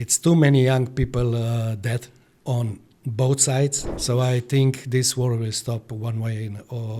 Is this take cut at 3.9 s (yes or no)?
yes